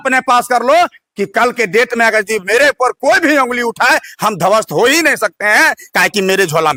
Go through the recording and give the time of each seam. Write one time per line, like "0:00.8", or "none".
none

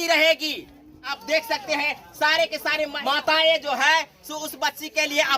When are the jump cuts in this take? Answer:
0:01.2
0:03.0

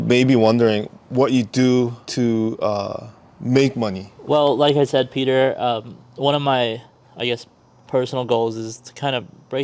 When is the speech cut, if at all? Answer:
0:04.1

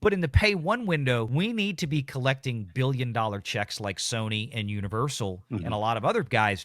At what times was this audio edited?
0:01.3

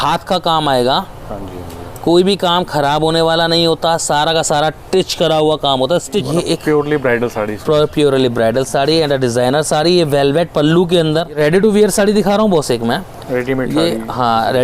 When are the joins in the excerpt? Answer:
0:06.3
0:11.4

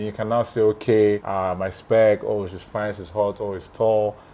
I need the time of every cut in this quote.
0:01.3

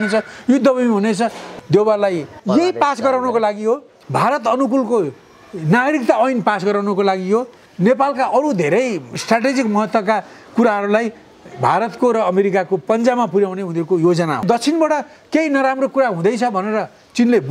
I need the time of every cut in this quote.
0:01.5
0:02.3
0:04.0
0:09.1
0:14.4

